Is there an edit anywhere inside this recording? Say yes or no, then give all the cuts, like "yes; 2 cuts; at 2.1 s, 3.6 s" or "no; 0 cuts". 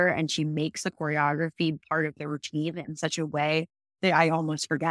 yes; 1 cut; at 1.8 s